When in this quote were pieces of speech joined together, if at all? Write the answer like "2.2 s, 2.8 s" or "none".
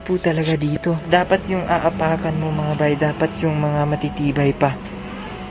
1.0 s